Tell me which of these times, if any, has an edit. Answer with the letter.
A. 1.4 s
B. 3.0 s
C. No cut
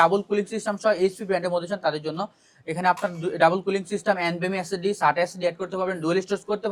C